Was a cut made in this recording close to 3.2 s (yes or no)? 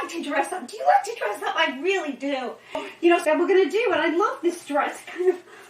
yes